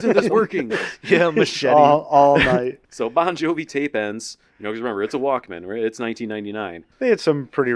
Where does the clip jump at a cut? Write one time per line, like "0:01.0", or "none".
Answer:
0:02.8
0:06.8